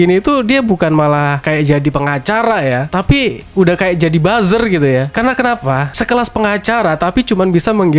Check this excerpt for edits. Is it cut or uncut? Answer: uncut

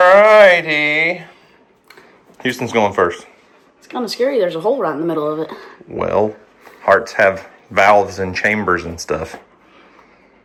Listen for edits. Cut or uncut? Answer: uncut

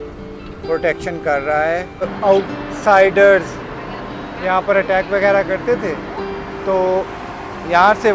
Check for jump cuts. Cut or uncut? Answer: cut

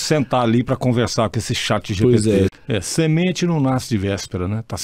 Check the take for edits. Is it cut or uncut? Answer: cut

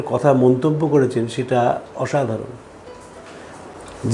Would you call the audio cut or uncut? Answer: uncut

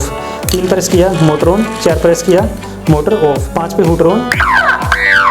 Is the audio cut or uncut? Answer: cut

